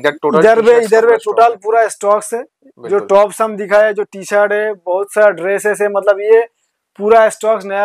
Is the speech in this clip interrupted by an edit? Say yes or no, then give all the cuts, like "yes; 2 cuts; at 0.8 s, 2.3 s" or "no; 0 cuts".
no; 0 cuts